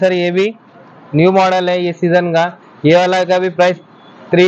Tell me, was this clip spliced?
no; 0 cuts

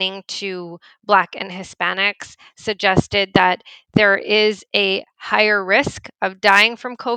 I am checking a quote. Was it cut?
no; 0 cuts

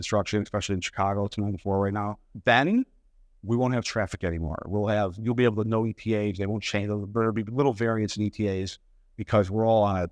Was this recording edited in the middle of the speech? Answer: yes; 1 cut; at 2.3 s

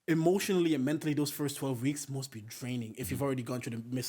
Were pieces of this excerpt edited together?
no; 0 cuts

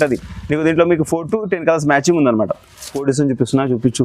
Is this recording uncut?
no; 1 cut; at 2.9 s

